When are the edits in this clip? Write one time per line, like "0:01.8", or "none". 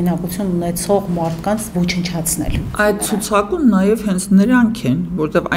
0:02.7